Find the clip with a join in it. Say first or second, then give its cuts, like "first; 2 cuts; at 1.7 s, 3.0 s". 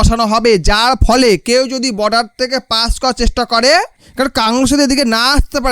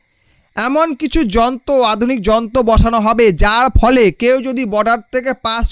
first; 1 cut; at 4.0 s